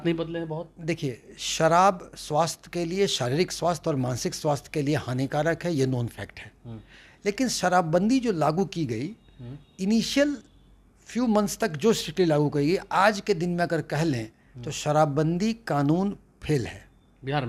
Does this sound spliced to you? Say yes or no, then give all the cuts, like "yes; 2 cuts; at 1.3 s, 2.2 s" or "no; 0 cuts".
no; 0 cuts